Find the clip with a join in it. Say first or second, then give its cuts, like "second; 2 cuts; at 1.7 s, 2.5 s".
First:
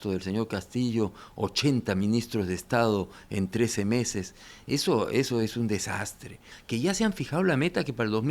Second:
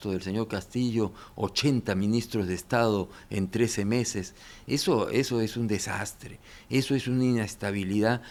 first; 1 cut; at 6.5 s